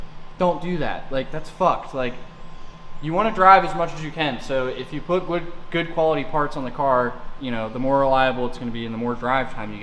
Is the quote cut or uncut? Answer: uncut